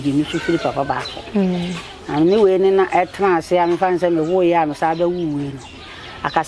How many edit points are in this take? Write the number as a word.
zero